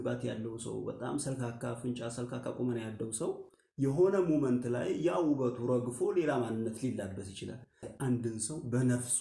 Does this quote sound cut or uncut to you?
cut